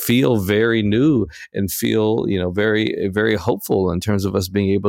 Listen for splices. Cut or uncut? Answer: uncut